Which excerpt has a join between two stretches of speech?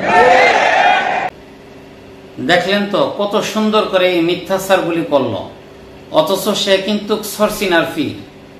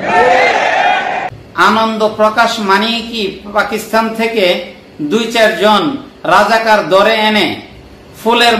second; 1 cut; at 1.4 s

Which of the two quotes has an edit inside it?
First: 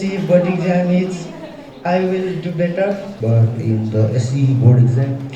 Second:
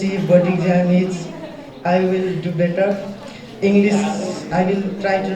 first; 1 cut; at 3.1 s

